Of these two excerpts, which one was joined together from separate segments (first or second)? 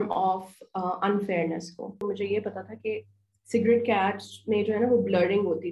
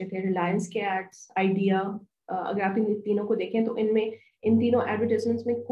first